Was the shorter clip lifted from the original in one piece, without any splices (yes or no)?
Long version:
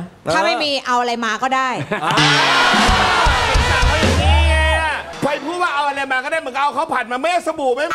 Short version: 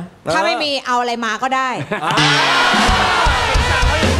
yes